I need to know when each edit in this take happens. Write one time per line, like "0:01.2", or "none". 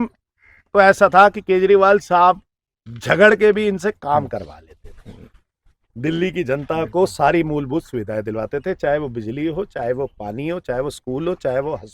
none